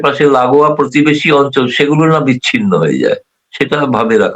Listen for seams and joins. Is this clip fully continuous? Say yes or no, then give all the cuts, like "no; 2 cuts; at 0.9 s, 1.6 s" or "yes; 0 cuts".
yes; 0 cuts